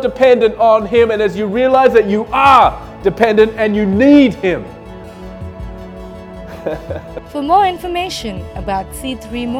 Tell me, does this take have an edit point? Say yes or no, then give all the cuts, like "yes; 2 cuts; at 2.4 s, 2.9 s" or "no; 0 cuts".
yes; 1 cut; at 7.2 s